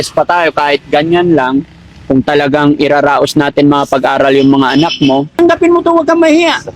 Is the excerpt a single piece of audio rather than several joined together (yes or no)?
no